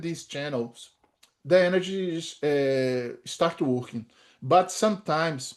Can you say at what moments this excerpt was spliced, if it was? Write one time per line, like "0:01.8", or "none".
none